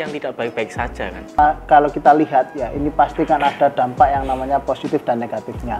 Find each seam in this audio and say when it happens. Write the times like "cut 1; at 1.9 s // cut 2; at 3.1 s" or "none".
cut 1; at 1.4 s